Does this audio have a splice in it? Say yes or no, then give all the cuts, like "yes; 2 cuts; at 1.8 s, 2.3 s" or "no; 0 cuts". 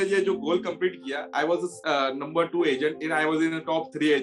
yes; 2 cuts; at 1.5 s, 3.0 s